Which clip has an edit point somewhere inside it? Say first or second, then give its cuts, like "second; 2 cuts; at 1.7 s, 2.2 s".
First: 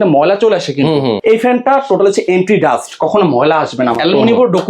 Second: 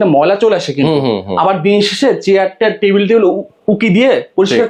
first; 2 cuts; at 1.2 s, 4.0 s